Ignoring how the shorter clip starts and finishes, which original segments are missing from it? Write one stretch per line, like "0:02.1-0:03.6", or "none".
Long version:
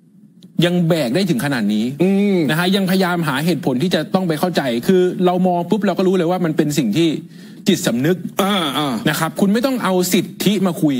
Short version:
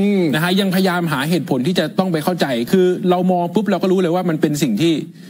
none